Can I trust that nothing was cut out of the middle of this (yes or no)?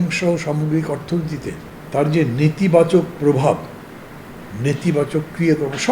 no